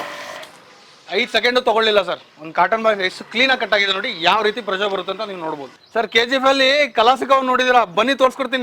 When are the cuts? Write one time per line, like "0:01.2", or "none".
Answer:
none